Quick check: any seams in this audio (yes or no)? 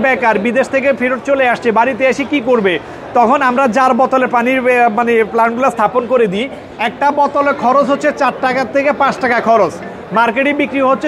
yes